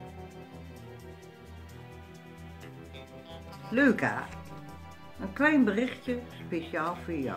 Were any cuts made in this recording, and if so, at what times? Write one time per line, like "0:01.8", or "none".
0:03.7

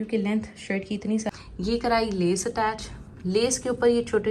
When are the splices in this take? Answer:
0:01.3

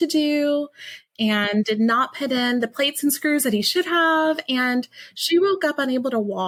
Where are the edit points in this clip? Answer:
none

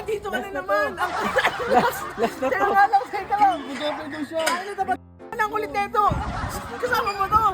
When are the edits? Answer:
0:05.2

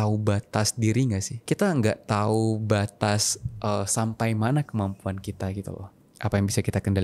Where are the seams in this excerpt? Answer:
0:01.3

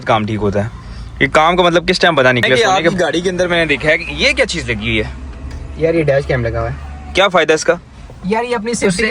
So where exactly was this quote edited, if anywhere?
0:02.7

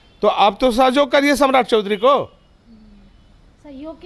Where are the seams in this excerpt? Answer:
none

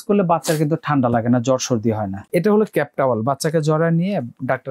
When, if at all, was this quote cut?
0:02.1

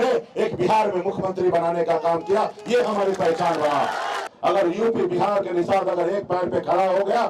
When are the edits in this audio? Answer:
0:04.2

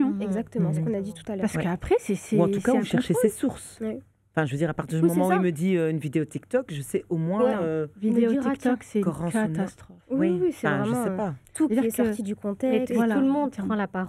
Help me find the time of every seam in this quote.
none

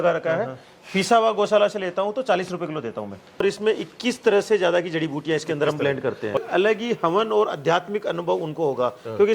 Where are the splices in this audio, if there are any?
0:03.4
0:06.4

